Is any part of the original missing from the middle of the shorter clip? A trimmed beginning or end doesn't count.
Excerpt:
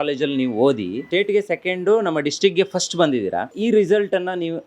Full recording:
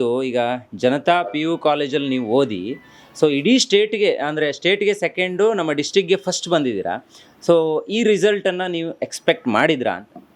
yes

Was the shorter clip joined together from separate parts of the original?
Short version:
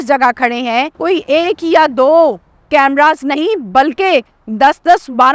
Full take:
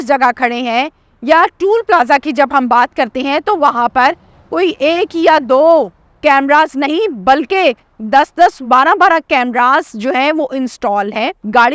yes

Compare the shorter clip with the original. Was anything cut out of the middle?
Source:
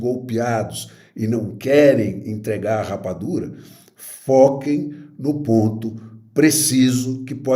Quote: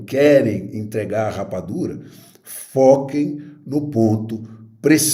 no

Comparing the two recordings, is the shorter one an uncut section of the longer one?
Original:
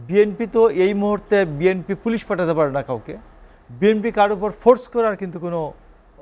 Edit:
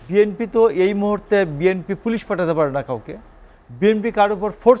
yes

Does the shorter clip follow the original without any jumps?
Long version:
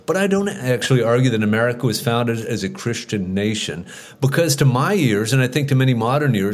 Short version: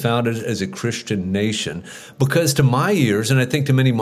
yes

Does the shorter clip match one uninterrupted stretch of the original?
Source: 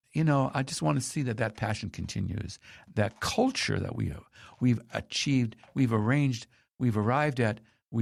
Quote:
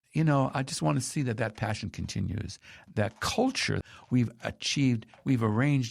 no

